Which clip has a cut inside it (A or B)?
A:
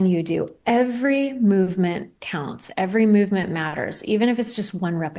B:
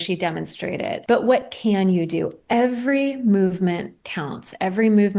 B